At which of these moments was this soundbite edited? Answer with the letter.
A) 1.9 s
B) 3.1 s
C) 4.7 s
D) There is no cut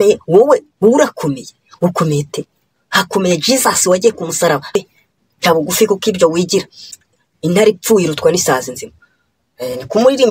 C